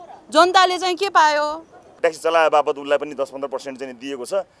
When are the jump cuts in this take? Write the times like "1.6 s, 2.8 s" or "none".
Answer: 1.9 s